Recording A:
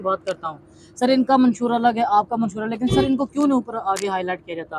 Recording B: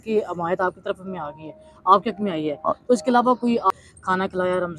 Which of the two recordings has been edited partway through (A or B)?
B